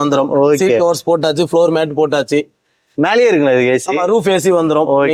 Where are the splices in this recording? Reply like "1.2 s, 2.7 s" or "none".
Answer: none